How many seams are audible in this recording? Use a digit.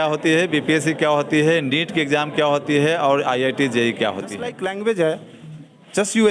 1